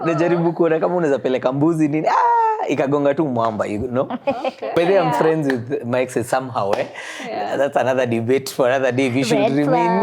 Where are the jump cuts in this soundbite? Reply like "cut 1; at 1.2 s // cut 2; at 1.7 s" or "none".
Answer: cut 1; at 4.7 s